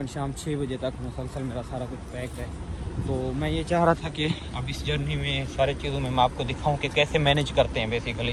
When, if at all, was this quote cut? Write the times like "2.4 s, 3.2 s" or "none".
none